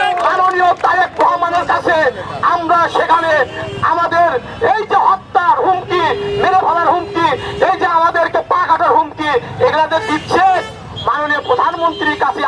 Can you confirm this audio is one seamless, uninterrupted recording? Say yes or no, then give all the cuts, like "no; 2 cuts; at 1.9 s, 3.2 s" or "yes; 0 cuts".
yes; 0 cuts